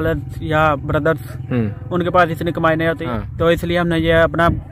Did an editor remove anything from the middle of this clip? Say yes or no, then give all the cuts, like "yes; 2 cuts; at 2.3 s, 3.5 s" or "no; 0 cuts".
yes; 1 cut; at 3.0 s